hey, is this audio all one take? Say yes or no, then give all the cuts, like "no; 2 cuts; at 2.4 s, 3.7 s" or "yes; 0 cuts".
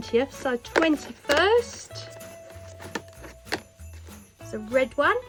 yes; 0 cuts